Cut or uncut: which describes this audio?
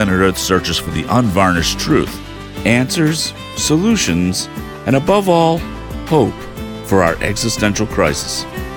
uncut